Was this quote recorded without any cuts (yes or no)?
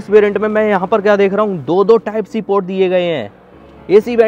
yes